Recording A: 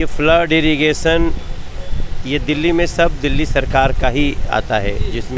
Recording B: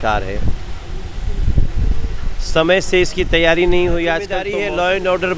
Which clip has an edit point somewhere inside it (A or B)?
B